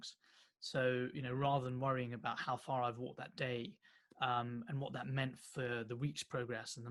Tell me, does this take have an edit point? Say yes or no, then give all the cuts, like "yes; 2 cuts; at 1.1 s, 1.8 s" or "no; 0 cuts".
no; 0 cuts